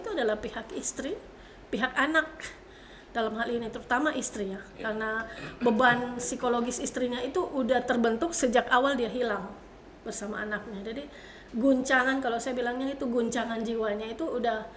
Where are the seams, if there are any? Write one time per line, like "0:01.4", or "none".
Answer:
none